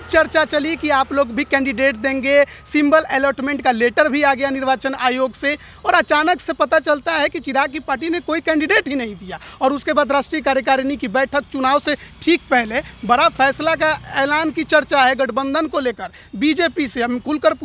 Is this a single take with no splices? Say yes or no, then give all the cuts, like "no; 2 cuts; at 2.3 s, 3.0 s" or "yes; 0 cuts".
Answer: yes; 0 cuts